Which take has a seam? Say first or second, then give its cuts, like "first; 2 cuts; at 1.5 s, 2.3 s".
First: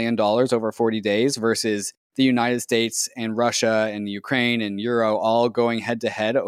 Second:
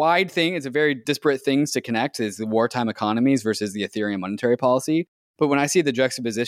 second; 2 cuts; at 1.0 s, 5.2 s